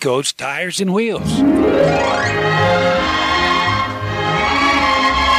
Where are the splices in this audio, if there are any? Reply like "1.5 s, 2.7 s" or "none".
1.2 s